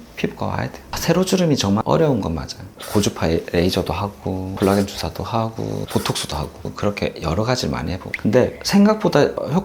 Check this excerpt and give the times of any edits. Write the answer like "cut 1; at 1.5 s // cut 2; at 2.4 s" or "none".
cut 1; at 0.9 s // cut 2; at 2.8 s // cut 3; at 4.5 s // cut 4; at 5.9 s

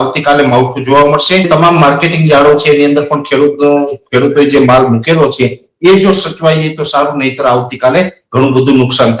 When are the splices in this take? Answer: cut 1; at 1.5 s

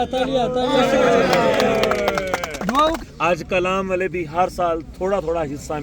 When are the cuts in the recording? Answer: cut 1; at 3.1 s

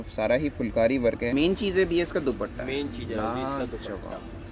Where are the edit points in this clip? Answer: cut 1; at 1.3 s

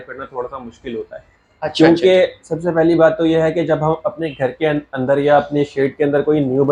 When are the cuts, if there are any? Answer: none

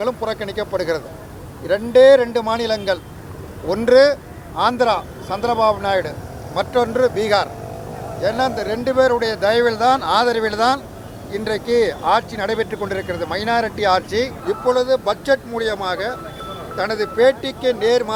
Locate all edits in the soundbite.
cut 1; at 14.4 s

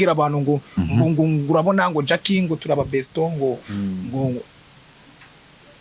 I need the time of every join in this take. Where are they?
none

